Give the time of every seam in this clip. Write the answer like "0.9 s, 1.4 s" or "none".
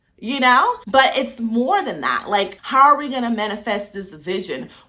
0.8 s, 2.6 s